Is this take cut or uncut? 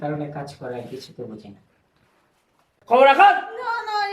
cut